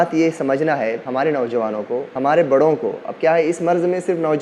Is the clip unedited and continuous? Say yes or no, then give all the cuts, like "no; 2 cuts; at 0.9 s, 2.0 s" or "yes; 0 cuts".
no; 2 cuts; at 1.0 s, 2.1 s